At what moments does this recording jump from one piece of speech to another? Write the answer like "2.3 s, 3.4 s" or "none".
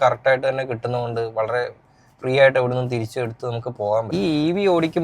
4.1 s